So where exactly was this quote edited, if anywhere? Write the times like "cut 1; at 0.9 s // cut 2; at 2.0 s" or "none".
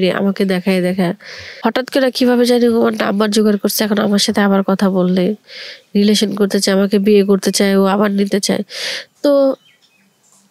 cut 1; at 1.4 s

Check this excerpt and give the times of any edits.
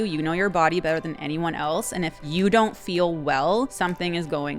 cut 1; at 2.2 s // cut 2; at 3.7 s

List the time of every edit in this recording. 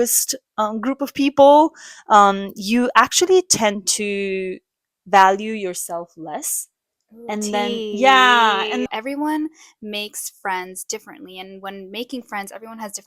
cut 1; at 8.9 s

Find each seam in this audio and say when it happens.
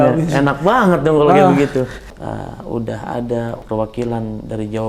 cut 1; at 2.1 s // cut 2; at 3.6 s

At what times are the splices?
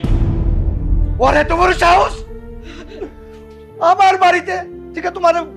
none

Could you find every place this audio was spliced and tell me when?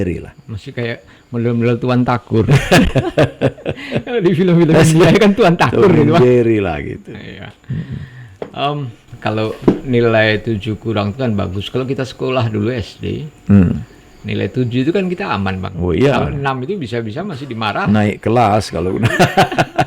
none

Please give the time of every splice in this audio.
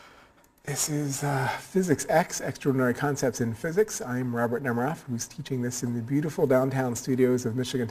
cut 1; at 1.1 s

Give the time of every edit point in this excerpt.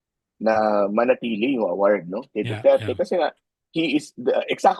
none

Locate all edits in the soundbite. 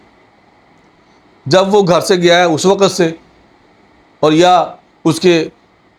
none

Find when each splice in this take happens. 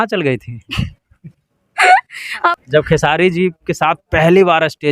cut 1; at 2.5 s

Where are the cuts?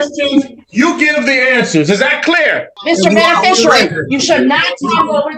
cut 1; at 2.7 s

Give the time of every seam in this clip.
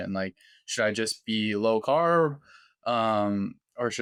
none

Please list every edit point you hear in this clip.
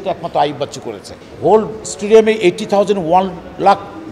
cut 1; at 1.2 s

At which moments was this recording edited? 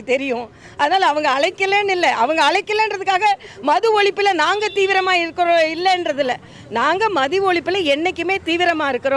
none

